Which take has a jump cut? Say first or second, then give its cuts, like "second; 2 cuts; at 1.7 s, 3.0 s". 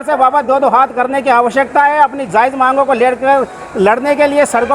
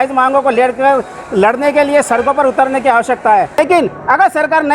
second; 1 cut; at 3.6 s